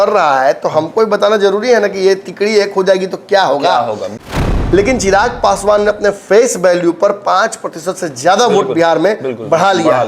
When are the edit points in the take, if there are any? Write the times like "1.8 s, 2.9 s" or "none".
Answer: 4.1 s